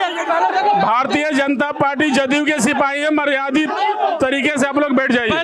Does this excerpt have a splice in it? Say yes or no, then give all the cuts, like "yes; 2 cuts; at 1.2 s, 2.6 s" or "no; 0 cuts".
no; 0 cuts